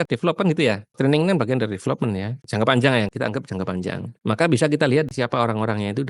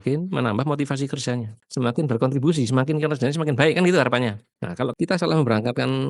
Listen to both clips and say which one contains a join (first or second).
first